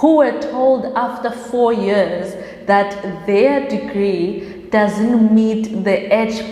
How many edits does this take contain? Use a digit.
0